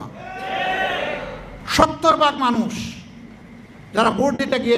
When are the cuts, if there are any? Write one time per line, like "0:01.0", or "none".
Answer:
0:01.6